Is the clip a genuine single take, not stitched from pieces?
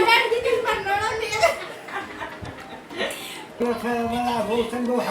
no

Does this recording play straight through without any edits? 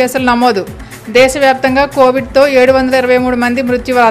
yes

